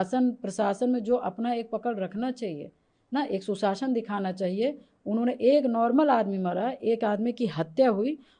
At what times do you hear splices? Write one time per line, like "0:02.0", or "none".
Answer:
none